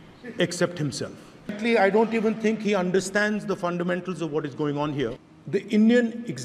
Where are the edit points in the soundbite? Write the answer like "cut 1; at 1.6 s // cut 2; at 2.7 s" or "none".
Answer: cut 1; at 1.6 s // cut 2; at 5.2 s